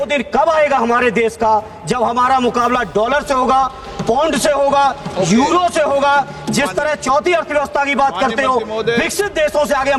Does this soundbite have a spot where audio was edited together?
no; 0 cuts

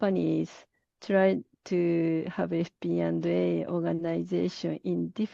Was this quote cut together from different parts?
no; 0 cuts

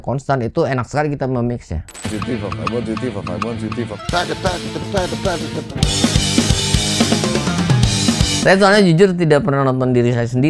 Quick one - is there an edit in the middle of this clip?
yes; 3 cuts; at 4.0 s, 5.7 s, 8.3 s

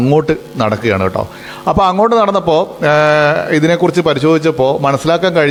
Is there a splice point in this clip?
no; 0 cuts

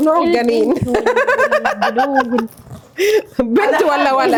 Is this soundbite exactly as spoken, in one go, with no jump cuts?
yes; 0 cuts

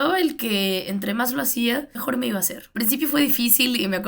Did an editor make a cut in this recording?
yes; 1 cut; at 2.4 s

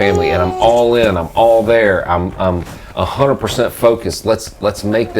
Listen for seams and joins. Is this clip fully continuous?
yes; 0 cuts

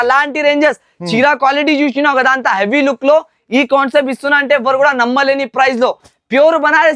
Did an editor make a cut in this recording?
no; 0 cuts

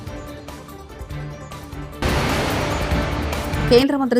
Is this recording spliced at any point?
yes; 1 cut; at 2.0 s

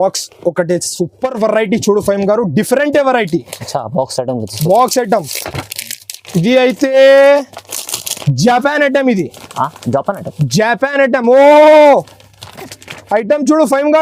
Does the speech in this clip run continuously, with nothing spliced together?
yes; 0 cuts

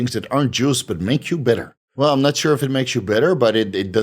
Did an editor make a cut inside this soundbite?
yes; 1 cut; at 1.8 s

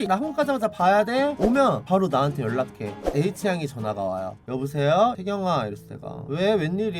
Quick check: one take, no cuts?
no; 3 cuts; at 1.3 s, 2.8 s, 4.4 s

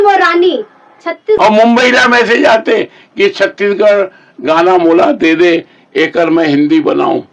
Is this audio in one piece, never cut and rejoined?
no; 1 cut; at 1.3 s

